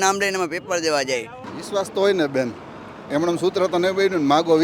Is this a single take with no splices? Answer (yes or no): no